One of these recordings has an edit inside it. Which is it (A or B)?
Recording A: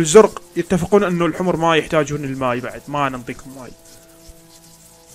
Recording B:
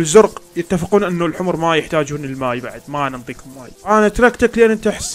B